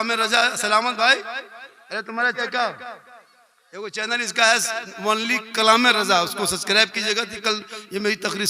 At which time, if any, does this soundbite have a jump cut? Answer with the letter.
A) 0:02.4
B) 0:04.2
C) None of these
A